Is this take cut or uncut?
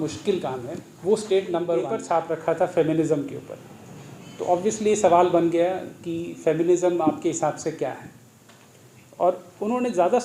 cut